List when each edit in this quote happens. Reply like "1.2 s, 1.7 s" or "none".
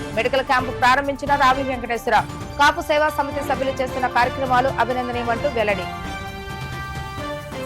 none